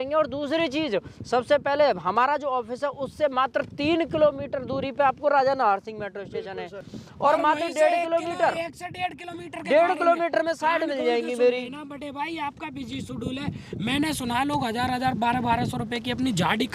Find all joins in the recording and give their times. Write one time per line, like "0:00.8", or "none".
none